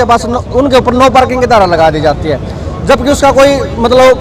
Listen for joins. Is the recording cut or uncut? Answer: uncut